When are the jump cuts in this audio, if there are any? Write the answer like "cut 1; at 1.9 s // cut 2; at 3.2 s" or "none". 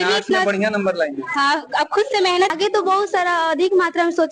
cut 1; at 2.5 s